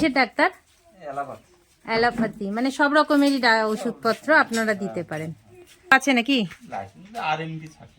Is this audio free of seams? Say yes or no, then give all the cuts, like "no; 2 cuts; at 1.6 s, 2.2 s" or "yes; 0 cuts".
no; 1 cut; at 5.9 s